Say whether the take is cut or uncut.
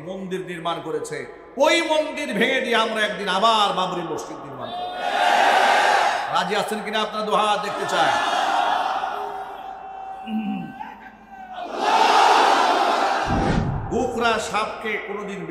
cut